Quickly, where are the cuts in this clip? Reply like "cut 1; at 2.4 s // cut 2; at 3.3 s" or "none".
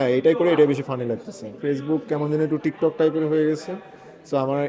cut 1; at 1.5 s